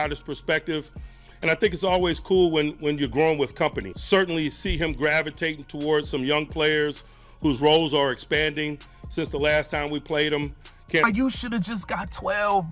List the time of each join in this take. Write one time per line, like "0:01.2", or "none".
0:03.9
0:11.0